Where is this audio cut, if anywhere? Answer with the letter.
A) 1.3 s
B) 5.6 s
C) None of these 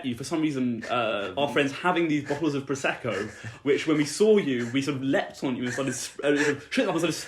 A